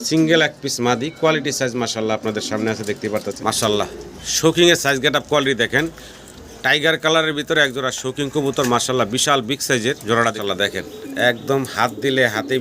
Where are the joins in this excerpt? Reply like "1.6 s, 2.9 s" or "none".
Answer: 3.4 s, 10.4 s